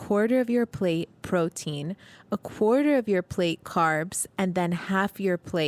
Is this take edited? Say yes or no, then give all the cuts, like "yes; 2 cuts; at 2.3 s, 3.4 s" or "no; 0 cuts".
no; 0 cuts